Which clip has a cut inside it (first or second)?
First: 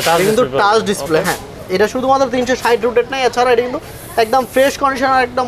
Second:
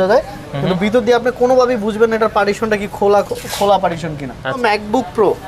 second